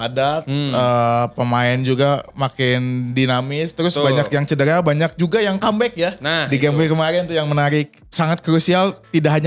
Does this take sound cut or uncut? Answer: cut